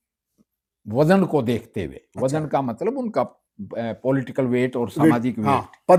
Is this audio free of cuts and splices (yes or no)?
yes